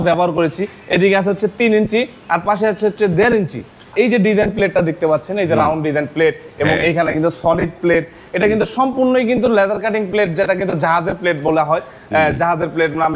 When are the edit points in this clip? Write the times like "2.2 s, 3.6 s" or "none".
3.9 s